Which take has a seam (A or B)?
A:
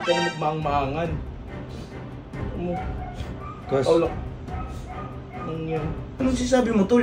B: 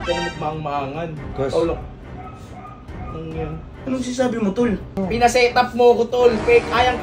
B